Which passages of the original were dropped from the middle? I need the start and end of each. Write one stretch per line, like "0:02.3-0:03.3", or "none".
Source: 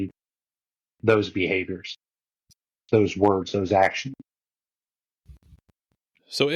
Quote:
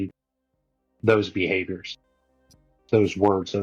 none